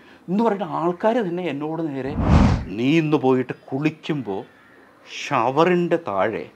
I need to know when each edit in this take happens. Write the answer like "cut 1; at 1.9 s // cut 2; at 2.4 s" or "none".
cut 1; at 2.3 s